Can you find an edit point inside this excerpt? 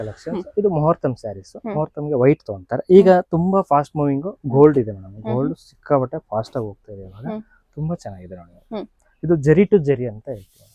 no; 0 cuts

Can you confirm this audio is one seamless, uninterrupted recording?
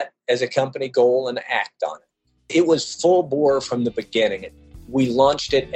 no; 2 cuts; at 2.4 s, 4.7 s

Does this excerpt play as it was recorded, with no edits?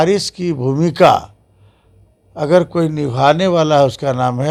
yes; 0 cuts

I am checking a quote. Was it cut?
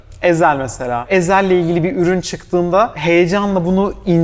yes; 2 cuts; at 1.0 s, 3.0 s

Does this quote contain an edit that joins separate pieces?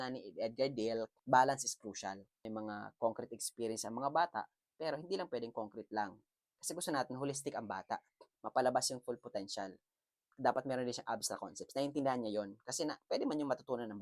yes; 2 cuts; at 1.2 s, 2.2 s

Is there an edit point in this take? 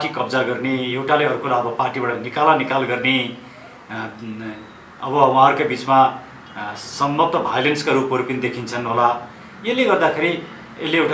no; 0 cuts

